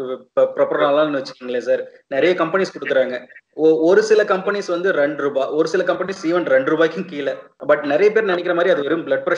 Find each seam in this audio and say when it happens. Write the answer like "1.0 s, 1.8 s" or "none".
7.5 s

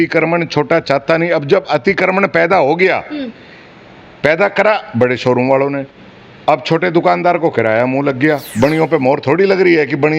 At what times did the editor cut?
8.5 s

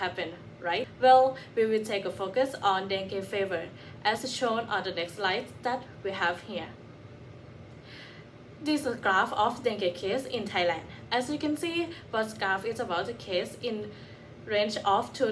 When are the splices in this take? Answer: 0.9 s

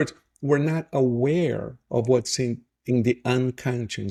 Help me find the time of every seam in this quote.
none

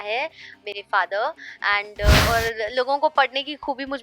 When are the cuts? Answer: 2.2 s

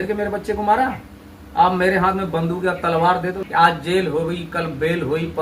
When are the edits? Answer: 3.4 s

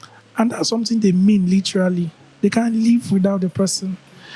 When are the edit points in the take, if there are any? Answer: none

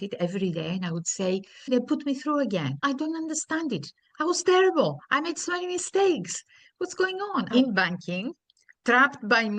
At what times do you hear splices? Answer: 1.7 s, 2.8 s, 7.5 s

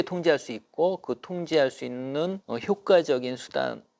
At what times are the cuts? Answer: 2.4 s

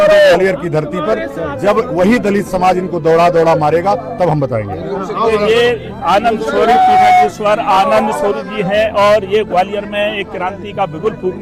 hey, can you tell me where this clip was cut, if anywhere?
none

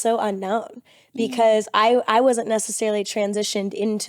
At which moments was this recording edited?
none

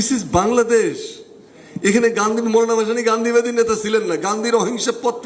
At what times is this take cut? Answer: none

